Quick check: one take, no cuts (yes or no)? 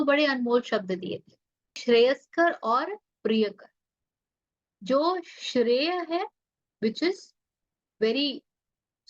no